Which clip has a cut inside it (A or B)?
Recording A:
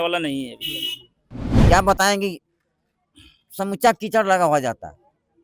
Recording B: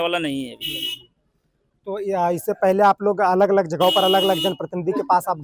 A